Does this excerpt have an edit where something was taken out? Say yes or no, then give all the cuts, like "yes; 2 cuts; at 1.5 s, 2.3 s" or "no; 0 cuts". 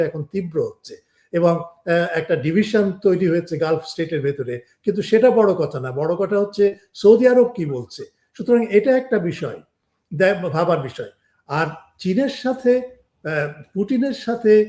no; 0 cuts